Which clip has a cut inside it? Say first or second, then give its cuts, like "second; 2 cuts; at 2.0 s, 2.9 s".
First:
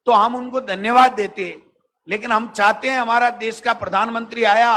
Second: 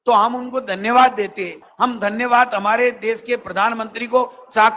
second; 1 cut; at 1.6 s